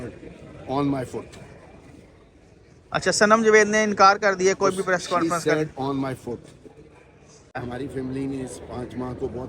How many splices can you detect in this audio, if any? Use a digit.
1